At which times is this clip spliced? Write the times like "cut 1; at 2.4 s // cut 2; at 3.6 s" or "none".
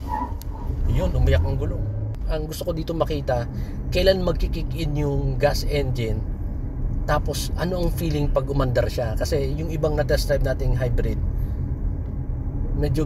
cut 1; at 2.2 s